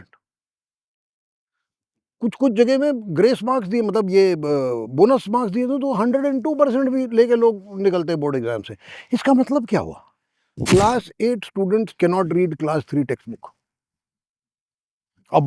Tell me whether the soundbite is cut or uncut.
cut